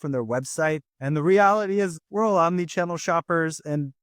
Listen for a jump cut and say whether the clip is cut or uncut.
cut